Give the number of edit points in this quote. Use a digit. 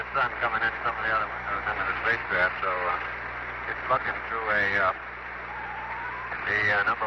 0